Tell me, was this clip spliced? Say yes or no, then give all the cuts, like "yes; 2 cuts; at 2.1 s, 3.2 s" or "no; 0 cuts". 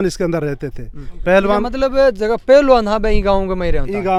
no; 0 cuts